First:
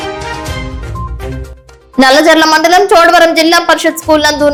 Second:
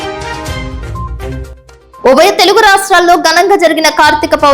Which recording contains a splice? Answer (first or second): second